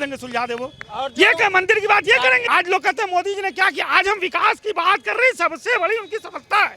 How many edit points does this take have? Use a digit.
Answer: 1